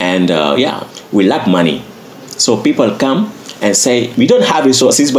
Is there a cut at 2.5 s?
no; 2 cuts; at 0.9 s, 4.1 s

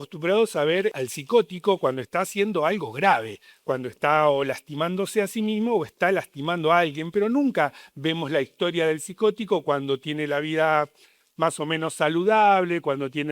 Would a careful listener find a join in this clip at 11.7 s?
no; 1 cut; at 1.0 s

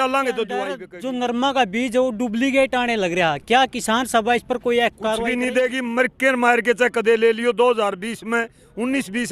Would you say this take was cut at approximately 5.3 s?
yes; 2 cuts; at 0.9 s, 5.3 s

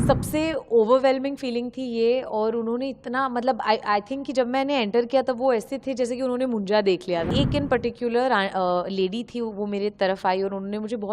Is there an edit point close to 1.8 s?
no; 1 cut; at 7.3 s

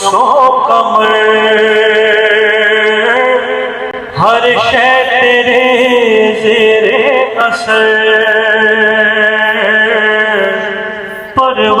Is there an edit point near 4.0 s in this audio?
no; 0 cuts

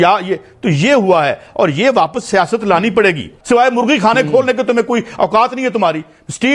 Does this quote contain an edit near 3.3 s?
yes; 1 cut; at 3.3 s

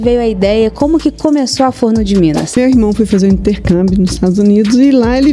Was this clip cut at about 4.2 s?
no; 1 cut; at 2.6 s

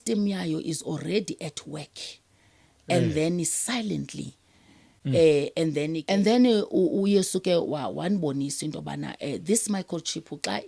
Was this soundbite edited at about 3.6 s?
no; 1 cut; at 6.0 s

